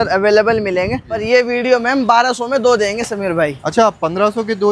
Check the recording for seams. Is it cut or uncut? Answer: cut